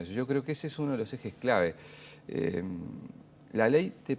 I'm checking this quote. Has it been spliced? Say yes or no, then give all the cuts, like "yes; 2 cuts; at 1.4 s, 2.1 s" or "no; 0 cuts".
no; 0 cuts